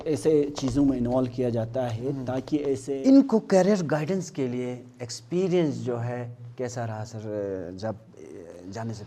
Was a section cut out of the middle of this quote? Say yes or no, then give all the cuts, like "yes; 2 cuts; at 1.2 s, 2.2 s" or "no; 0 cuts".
yes; 1 cut; at 2.9 s